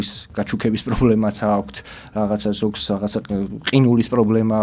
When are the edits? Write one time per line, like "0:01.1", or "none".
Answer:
none